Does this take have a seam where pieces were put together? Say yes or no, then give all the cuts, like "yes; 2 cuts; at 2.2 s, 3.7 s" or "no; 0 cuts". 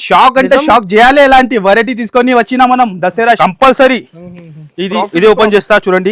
yes; 1 cut; at 3.4 s